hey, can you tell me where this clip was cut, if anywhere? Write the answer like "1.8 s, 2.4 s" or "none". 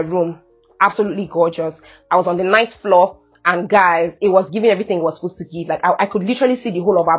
none